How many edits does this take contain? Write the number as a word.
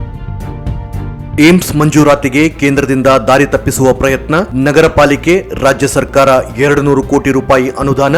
one